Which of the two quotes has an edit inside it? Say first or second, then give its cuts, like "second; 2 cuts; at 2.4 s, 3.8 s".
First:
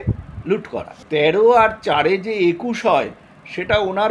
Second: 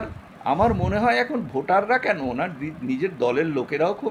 first; 1 cut; at 0.9 s